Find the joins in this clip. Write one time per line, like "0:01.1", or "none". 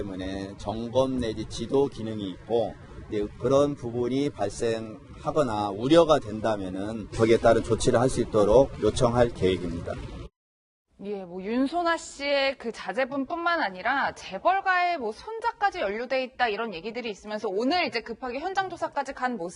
0:07.9